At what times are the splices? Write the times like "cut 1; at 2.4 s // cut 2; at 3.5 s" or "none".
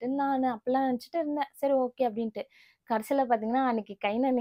none